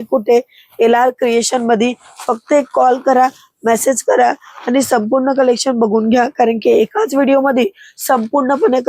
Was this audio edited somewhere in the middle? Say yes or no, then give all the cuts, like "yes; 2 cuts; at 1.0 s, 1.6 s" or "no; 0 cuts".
no; 0 cuts